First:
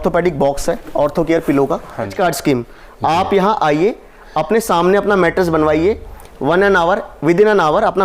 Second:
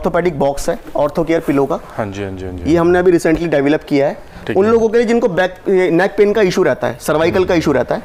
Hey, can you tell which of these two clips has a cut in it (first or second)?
first